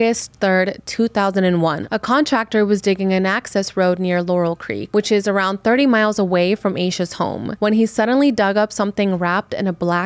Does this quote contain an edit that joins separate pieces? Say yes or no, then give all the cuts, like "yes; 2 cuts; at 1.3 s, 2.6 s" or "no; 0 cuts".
yes; 3 cuts; at 1.8 s, 4.7 s, 7.5 s